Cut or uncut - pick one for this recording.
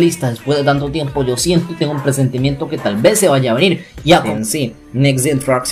cut